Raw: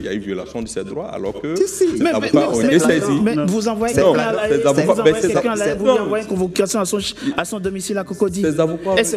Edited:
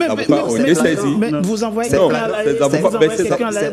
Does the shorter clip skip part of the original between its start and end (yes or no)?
no